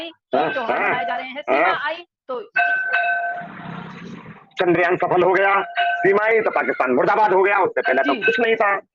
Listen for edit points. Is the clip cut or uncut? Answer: uncut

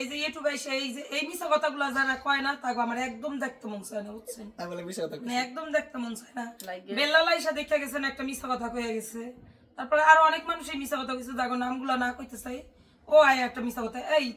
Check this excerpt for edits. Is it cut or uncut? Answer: uncut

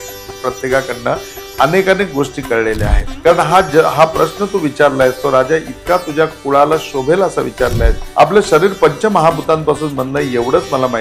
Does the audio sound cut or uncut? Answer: cut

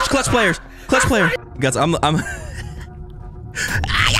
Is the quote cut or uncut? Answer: cut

